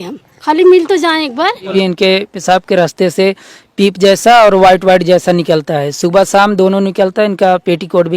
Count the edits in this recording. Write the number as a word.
one